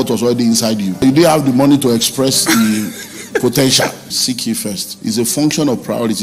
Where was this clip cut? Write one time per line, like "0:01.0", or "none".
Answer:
0:01.0
0:04.3